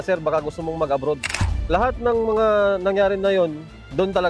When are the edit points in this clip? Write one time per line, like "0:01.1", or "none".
0:01.3